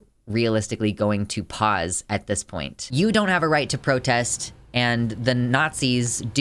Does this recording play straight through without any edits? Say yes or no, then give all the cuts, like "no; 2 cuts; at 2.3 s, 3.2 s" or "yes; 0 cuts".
no; 1 cut; at 2.9 s